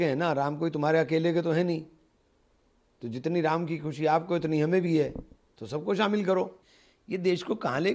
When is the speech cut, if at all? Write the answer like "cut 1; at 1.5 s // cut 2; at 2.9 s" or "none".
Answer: cut 1; at 6.6 s